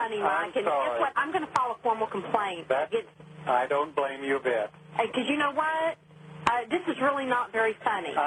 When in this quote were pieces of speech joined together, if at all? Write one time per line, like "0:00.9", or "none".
none